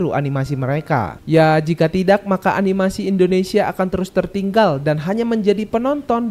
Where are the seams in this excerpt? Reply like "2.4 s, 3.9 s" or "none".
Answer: 1.2 s